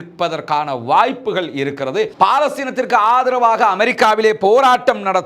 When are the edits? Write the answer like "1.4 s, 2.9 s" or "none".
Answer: 2.1 s